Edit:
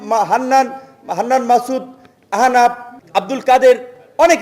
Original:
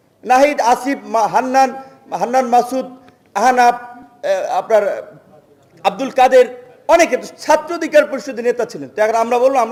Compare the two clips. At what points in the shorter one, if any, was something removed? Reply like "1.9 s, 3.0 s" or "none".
2.9 s